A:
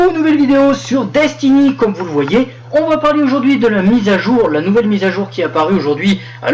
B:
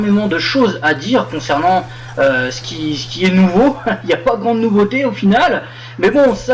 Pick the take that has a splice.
B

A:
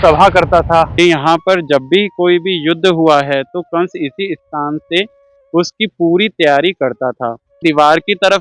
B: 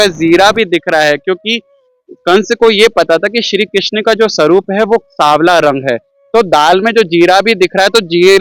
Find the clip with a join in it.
A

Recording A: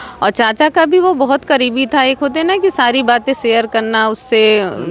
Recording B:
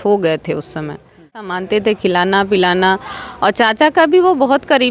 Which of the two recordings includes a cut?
B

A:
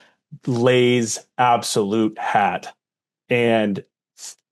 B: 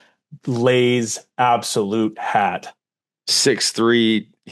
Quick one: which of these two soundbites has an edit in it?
B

